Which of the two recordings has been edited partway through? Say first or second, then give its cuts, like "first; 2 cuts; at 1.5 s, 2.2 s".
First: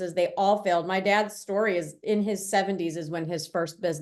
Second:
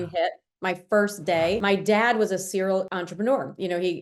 second; 2 cuts; at 1.6 s, 3.0 s